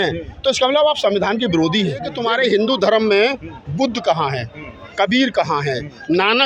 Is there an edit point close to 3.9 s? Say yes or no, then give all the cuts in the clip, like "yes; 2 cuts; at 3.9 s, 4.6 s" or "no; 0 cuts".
no; 1 cut; at 2.1 s